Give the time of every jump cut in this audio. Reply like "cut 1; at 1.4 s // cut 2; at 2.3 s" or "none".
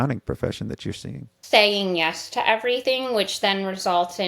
cut 1; at 1.3 s // cut 2; at 2.8 s